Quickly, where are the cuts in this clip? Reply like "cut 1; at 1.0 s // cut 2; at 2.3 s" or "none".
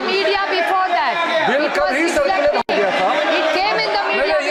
none